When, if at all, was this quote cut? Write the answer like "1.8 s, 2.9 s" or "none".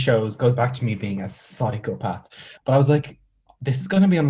2.4 s

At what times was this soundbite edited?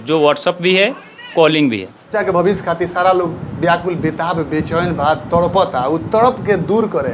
2.1 s

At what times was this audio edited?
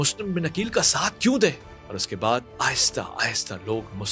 none

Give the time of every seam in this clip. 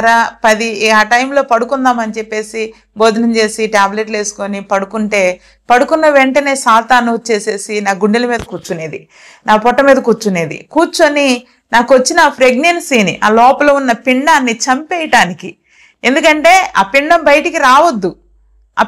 none

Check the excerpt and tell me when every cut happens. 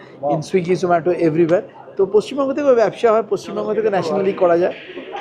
none

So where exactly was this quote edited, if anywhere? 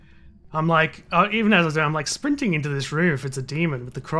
none

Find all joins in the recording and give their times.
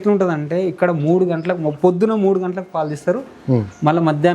none

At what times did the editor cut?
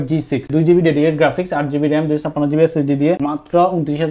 3.2 s

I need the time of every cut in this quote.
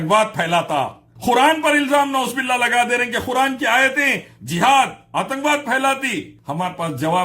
1.1 s, 6.4 s

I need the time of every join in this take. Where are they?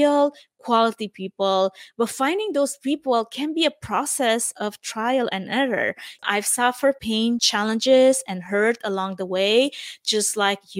6.1 s, 7.1 s

